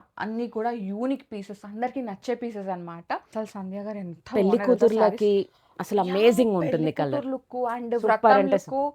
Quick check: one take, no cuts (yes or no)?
no